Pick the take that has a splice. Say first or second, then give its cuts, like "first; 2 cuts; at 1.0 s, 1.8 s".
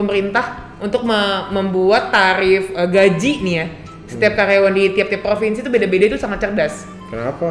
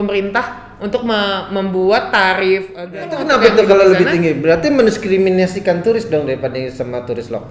second; 1 cut; at 2.8 s